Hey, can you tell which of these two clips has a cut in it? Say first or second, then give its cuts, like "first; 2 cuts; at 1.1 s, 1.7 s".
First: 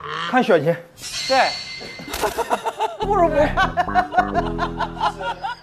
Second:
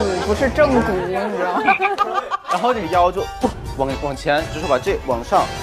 second; 1 cut; at 2.8 s